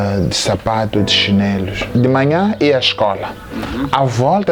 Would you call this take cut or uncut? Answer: cut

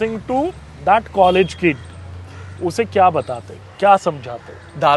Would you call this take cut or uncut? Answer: uncut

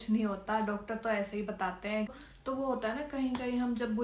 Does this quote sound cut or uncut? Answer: cut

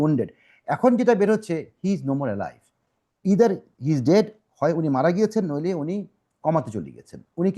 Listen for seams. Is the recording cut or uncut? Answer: uncut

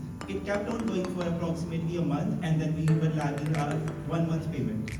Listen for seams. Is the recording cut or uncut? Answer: uncut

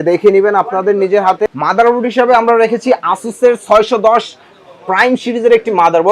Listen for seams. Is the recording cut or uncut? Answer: cut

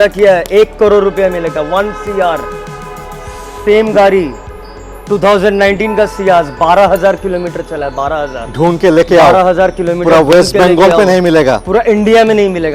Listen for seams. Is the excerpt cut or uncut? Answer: uncut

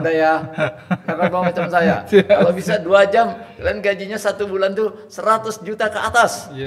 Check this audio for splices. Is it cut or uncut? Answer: uncut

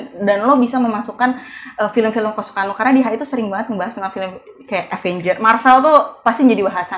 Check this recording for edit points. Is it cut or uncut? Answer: uncut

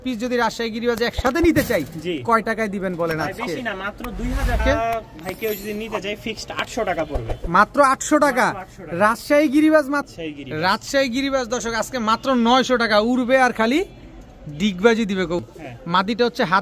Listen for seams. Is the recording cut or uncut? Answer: cut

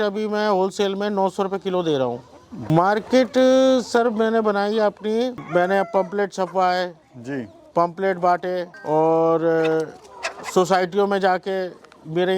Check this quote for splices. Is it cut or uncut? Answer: cut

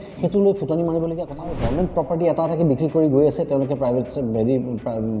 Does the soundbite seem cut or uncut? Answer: cut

